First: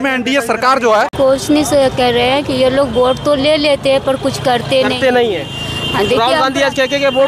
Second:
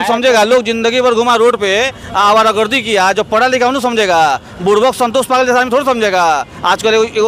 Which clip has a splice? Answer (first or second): first